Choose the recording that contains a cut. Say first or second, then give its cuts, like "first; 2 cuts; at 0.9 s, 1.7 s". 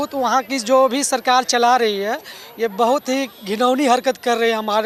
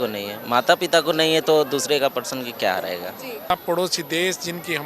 second; 1 cut; at 3.5 s